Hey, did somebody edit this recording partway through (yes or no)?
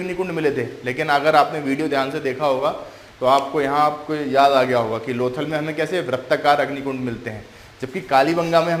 no